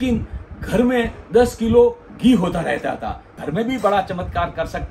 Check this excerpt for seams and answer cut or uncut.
cut